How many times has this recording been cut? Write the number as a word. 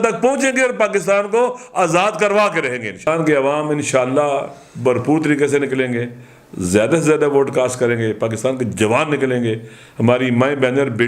one